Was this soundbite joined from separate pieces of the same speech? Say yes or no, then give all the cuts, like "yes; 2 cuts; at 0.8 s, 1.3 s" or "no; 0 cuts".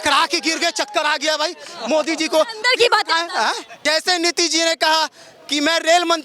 yes; 1 cut; at 3.7 s